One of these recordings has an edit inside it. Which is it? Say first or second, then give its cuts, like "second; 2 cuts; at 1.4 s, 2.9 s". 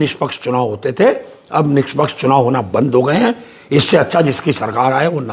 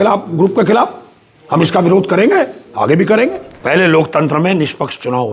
second; 1 cut; at 3.5 s